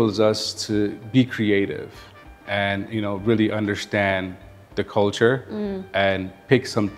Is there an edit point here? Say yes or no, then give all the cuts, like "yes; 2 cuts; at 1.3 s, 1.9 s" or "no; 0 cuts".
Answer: no; 0 cuts